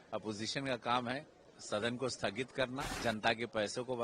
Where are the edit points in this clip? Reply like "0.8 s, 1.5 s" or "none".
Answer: 2.9 s